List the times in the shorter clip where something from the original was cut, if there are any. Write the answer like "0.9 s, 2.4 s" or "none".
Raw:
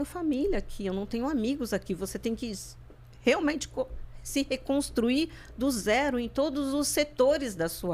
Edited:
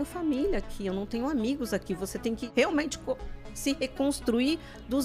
2.5 s

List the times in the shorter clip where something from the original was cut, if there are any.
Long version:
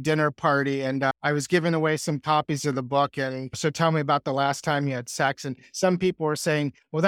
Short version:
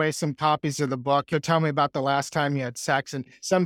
1.3 s

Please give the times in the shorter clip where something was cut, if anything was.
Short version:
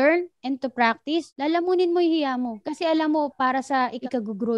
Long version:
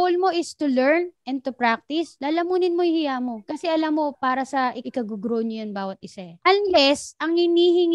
none

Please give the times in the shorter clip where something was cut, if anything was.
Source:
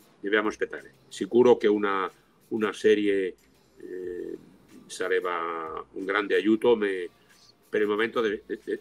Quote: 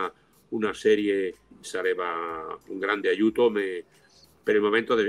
1.5 s

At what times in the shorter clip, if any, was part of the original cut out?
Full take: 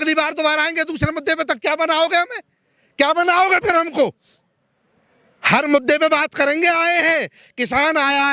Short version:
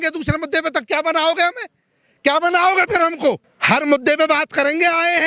3.5 s

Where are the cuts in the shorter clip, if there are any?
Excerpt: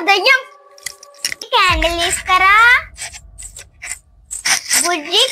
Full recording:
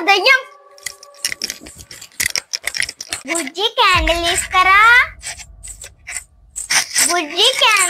1.5 s

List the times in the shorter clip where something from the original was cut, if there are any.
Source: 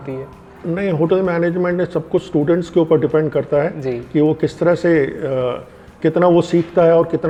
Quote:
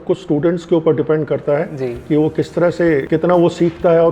3.1 s

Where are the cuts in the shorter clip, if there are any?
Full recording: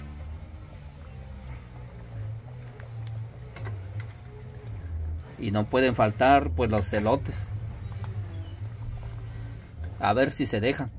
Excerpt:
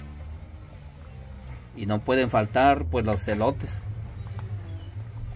1.8 s

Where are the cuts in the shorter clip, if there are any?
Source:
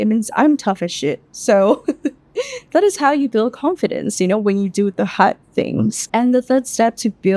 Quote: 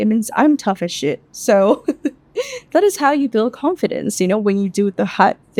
none

